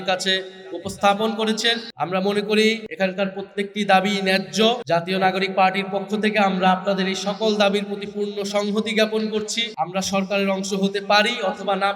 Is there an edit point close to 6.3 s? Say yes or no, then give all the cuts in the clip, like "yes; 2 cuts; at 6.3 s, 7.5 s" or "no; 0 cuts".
no; 4 cuts; at 1.9 s, 2.9 s, 4.8 s, 9.6 s